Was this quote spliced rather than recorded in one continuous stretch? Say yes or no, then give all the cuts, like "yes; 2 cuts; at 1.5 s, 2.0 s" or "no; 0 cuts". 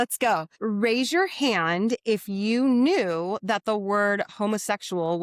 no; 0 cuts